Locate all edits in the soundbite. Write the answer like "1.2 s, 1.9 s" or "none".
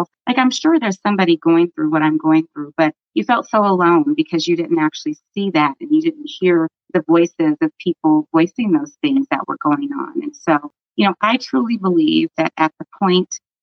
6.8 s